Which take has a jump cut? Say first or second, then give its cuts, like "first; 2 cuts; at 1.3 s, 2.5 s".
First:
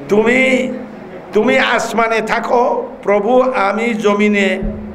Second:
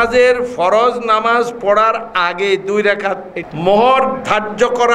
second; 1 cut; at 3.3 s